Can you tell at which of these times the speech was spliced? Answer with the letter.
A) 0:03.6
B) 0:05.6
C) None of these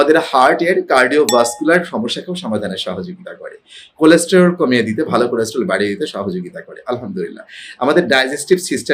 C